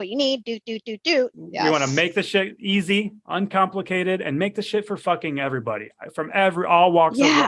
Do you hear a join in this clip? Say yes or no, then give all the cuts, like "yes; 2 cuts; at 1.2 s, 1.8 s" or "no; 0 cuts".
yes; 1 cut; at 1.4 s